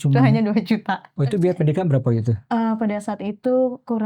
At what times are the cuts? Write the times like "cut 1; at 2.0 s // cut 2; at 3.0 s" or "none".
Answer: cut 1; at 1.1 s